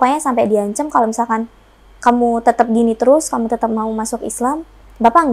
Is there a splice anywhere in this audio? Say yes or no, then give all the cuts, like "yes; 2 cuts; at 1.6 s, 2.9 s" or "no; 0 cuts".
no; 0 cuts